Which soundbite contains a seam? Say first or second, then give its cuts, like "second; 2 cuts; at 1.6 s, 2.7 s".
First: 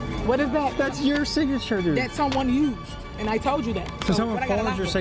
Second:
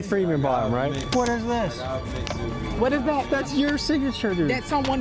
second; 1 cut; at 1.0 s